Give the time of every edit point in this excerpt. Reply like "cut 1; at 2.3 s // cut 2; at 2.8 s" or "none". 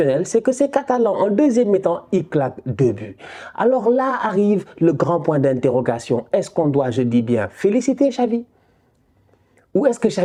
none